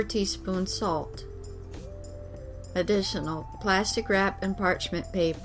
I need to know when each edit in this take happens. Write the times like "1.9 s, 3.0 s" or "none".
1.1 s, 2.7 s